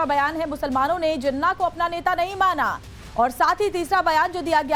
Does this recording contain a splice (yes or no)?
no